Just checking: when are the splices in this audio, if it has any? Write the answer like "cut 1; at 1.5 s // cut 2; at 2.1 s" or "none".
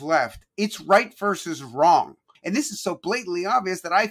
cut 1; at 2.3 s